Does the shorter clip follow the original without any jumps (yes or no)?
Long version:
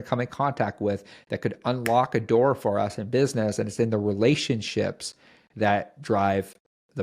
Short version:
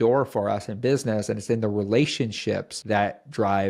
no